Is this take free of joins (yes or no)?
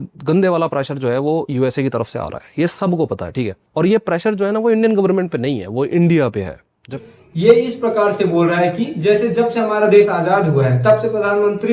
yes